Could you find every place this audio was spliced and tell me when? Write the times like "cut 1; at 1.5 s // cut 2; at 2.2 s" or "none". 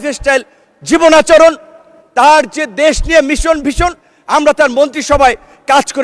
none